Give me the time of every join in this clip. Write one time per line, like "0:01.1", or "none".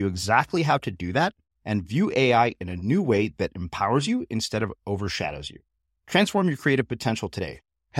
none